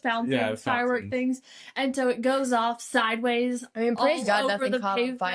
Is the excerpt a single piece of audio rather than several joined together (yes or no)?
yes